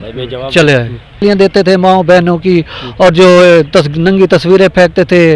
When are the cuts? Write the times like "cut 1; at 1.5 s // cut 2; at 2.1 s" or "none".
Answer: cut 1; at 1.2 s